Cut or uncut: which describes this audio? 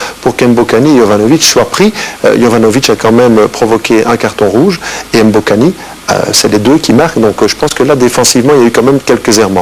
cut